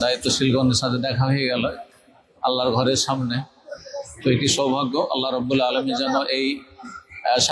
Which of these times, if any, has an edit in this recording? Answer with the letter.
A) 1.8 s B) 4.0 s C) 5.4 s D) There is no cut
D